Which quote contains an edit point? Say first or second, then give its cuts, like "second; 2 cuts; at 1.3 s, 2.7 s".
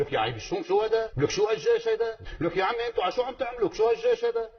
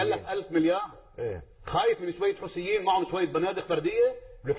first; 2 cuts; at 1.1 s, 2.2 s